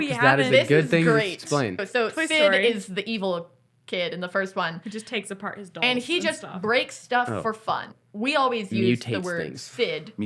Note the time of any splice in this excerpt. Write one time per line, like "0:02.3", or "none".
0:01.9
0:08.0